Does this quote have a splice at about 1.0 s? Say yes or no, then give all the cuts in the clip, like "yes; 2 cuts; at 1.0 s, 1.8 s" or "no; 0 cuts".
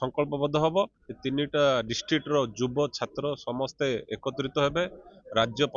yes; 1 cut; at 1.0 s